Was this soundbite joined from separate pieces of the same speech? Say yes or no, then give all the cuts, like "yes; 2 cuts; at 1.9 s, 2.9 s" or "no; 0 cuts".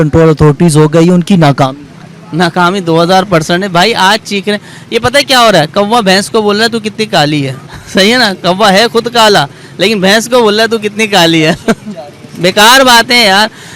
no; 0 cuts